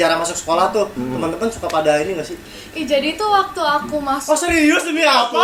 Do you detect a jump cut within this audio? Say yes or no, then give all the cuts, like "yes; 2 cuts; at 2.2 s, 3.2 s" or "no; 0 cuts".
no; 0 cuts